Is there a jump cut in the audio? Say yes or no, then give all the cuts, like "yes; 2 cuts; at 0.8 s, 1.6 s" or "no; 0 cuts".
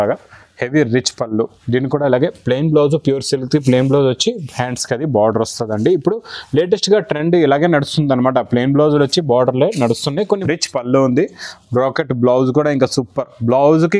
yes; 1 cut; at 10.2 s